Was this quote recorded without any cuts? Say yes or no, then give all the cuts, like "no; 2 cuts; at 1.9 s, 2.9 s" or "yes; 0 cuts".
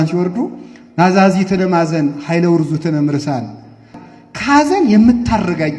no; 1 cut; at 3.9 s